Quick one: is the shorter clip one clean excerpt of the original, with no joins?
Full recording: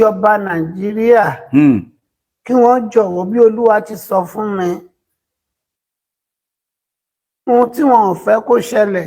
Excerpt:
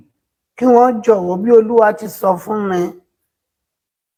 yes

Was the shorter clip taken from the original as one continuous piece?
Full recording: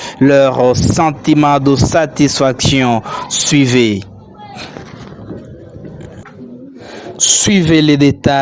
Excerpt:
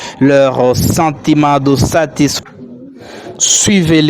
no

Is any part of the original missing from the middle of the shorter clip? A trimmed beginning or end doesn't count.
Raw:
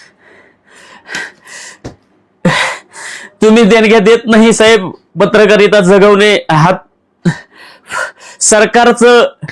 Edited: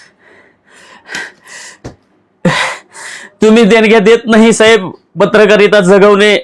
no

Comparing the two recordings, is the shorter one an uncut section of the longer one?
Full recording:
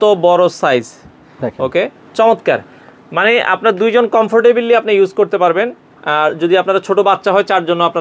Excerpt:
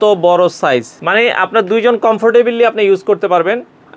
no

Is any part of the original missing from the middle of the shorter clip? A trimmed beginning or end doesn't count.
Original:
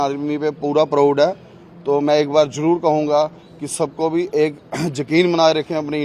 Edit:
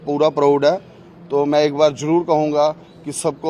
no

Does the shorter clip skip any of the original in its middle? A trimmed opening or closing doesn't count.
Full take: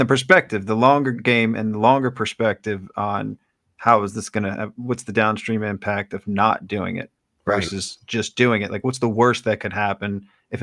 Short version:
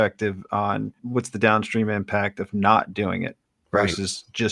yes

